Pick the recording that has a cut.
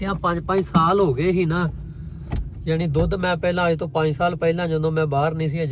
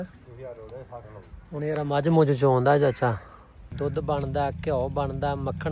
second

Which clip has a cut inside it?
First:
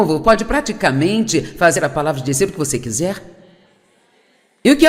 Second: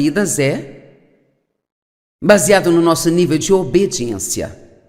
second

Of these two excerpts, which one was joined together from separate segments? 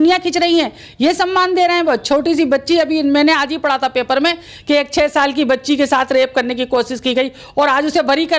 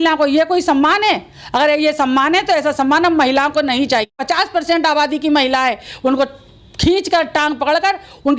second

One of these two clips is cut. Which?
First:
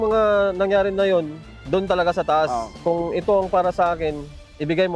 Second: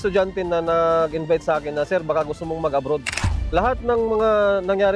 second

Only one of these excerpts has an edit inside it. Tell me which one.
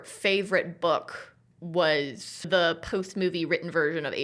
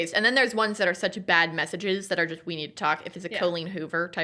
first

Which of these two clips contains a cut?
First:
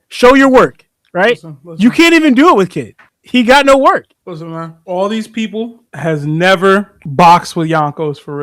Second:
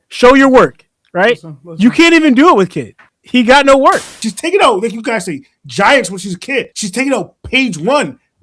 second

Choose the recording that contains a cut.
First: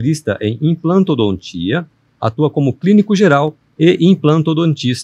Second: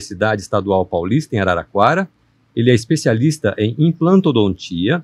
first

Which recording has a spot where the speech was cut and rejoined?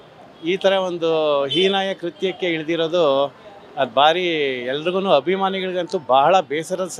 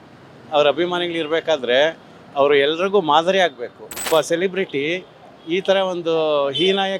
second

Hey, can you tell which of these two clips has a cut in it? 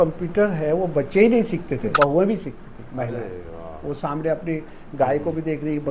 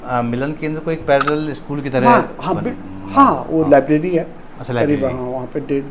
first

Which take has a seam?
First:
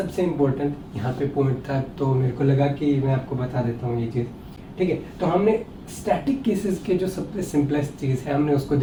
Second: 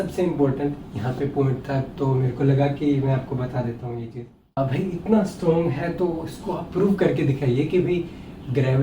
second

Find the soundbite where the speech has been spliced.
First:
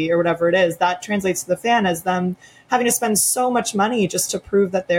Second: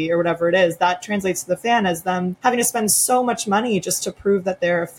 second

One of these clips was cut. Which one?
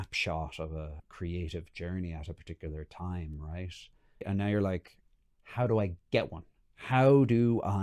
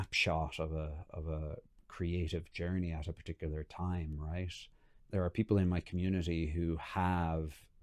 first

